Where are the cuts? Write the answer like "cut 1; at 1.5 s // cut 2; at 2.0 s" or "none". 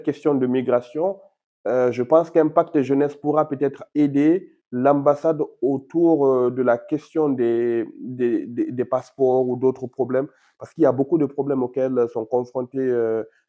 none